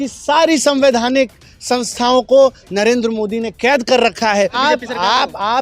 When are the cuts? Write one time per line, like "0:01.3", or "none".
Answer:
0:04.6